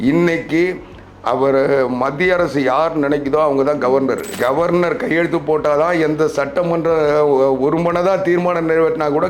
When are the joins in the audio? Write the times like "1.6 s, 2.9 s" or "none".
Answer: 4.3 s

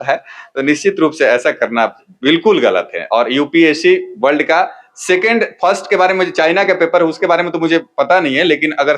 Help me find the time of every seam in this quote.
none

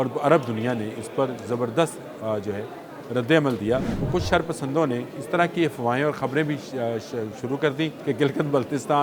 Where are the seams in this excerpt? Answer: 4.0 s, 8.0 s

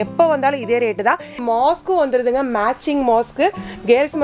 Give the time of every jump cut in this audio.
1.3 s

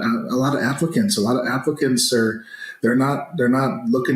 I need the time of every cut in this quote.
none

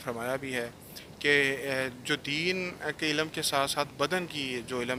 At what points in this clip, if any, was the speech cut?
none

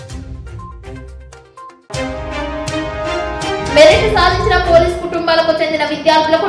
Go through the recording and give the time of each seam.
none

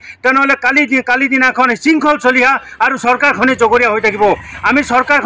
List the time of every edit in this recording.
none

